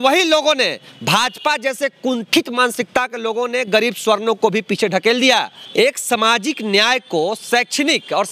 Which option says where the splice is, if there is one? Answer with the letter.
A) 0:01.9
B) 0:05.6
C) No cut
B